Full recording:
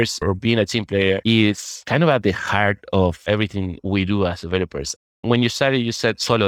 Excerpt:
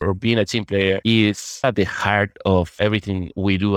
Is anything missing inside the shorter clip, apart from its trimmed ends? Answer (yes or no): yes